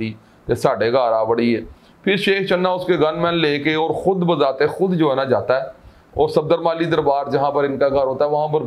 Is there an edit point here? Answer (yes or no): no